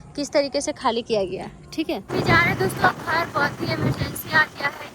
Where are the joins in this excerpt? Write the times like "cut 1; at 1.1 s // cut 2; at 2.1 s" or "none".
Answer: cut 1; at 2.0 s